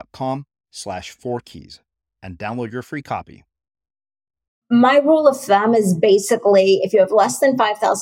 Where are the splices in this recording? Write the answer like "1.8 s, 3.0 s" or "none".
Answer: 4.6 s